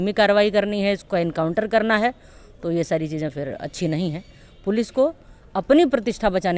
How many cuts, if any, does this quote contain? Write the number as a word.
zero